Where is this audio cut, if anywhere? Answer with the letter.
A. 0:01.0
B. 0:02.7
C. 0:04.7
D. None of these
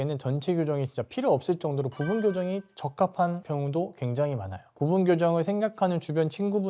C